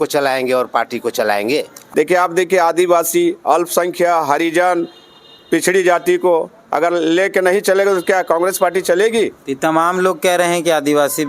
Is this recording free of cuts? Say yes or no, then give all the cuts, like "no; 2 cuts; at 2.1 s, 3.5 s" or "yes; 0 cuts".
no; 1 cut; at 1.8 s